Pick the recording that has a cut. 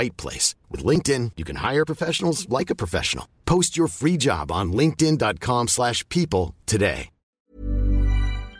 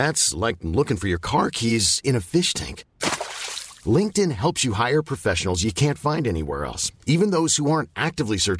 first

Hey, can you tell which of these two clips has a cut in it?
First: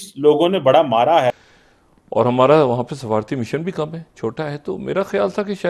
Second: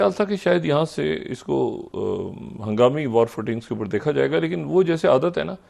first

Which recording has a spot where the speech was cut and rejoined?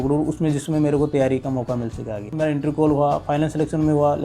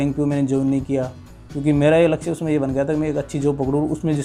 first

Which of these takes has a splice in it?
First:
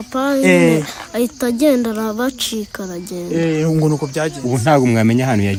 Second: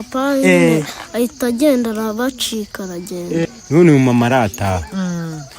second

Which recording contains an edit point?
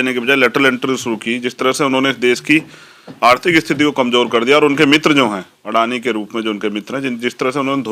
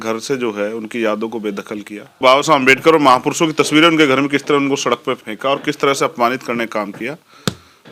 second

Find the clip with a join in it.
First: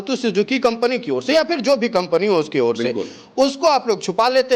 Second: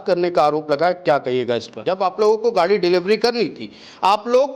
second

